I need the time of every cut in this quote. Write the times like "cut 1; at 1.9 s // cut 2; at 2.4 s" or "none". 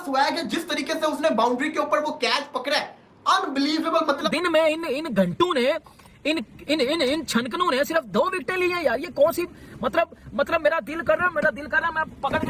cut 1; at 4.2 s